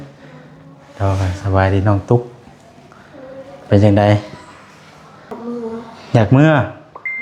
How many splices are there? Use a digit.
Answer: 1